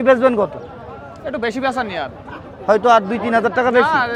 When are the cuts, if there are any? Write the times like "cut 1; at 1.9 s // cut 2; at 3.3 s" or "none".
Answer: none